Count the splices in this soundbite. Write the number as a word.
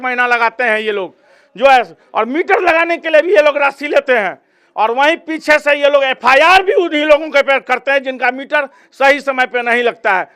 zero